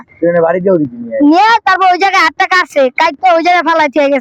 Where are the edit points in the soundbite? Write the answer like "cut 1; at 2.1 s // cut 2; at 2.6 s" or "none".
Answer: none